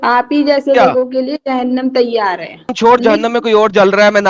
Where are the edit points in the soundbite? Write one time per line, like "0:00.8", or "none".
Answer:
0:02.7